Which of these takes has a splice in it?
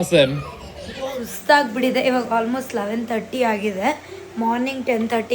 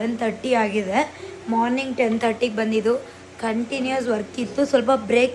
first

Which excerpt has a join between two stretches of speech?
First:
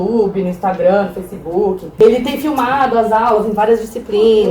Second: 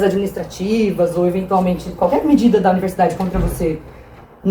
first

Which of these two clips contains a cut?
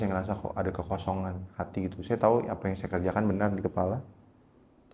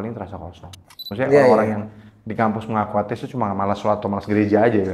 second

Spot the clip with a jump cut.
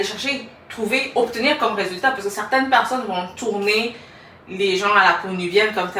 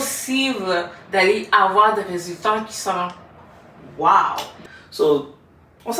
second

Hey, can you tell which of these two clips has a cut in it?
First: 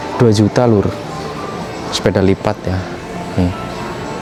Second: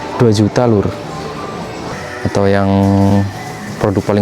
second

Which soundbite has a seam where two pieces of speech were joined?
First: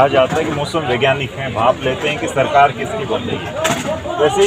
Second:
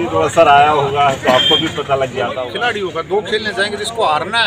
second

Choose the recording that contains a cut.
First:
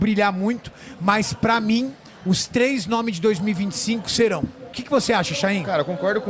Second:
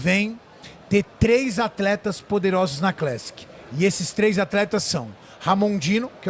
first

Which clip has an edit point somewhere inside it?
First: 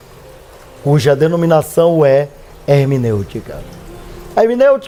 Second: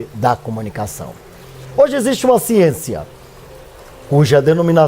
second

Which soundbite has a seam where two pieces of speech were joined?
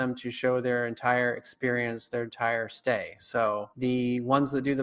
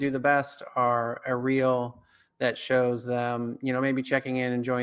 first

